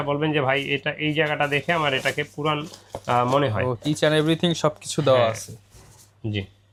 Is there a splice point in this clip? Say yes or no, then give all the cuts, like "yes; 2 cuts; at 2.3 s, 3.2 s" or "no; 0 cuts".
no; 0 cuts